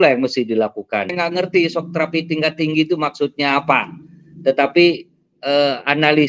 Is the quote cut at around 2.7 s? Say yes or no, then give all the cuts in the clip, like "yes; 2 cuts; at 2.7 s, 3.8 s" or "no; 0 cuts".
no; 1 cut; at 1.1 s